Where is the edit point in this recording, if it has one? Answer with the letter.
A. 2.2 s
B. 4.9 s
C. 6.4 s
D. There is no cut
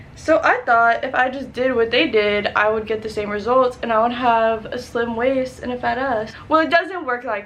C